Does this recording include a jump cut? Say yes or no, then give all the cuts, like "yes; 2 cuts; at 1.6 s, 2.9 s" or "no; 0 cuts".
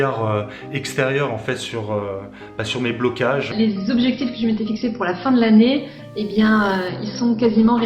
yes; 1 cut; at 3.5 s